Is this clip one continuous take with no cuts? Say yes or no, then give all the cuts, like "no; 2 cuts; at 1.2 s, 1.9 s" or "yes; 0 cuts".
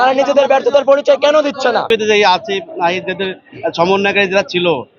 no; 1 cut; at 1.9 s